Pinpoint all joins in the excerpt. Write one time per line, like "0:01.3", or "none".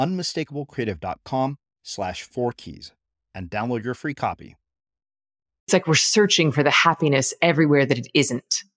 0:05.7